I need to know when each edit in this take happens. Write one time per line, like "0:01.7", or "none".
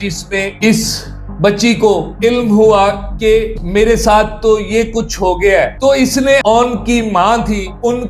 0:06.4